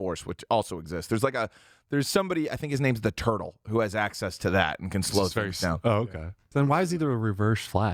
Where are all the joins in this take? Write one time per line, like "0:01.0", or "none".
0:06.4